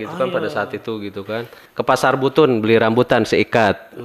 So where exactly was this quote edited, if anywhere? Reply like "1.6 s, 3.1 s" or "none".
1.6 s